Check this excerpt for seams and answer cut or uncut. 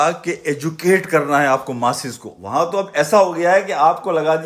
cut